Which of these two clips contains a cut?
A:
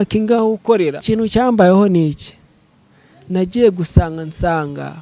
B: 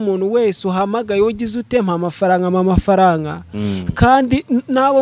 A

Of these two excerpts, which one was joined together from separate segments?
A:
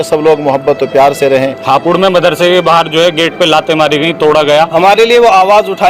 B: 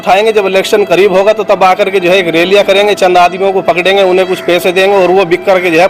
A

